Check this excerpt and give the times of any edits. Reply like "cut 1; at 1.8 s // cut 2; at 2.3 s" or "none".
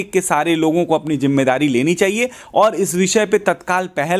none